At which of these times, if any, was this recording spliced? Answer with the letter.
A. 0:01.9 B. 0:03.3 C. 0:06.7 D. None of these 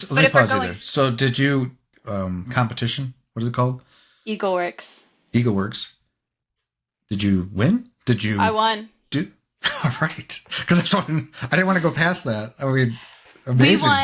A